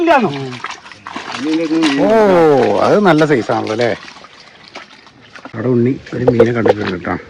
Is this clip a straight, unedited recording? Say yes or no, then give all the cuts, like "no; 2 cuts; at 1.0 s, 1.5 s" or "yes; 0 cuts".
no; 1 cut; at 5.5 s